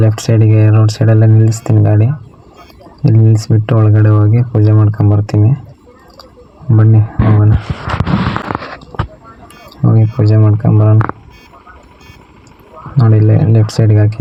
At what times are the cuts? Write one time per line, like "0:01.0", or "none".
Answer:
none